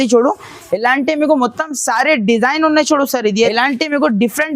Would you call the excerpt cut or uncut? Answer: cut